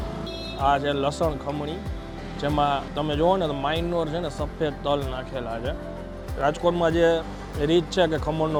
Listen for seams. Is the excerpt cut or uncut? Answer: uncut